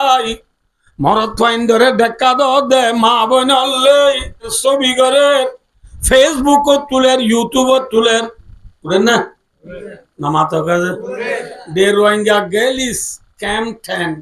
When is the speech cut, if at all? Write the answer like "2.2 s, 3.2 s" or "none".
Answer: 4.6 s